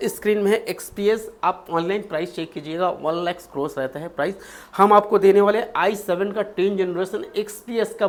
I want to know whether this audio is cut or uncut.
uncut